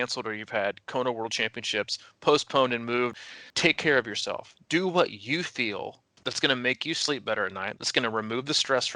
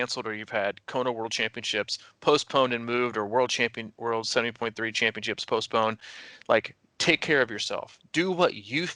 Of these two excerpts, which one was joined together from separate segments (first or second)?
first